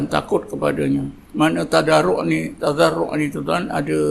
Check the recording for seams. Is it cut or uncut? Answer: cut